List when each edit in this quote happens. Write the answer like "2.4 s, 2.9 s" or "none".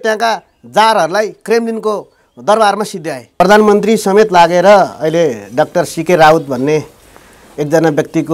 3.2 s